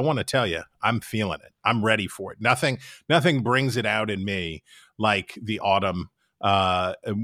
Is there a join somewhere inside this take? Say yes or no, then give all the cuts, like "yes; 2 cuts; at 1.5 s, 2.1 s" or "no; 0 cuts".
no; 0 cuts